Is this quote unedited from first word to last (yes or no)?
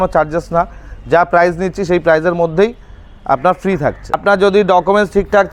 no